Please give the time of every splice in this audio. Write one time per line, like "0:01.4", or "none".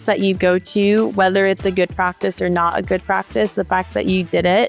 none